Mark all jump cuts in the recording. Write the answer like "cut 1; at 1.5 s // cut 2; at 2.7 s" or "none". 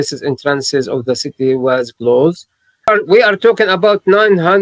cut 1; at 2.9 s